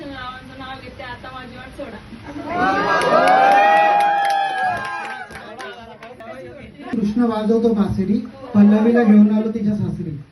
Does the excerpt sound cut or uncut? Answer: cut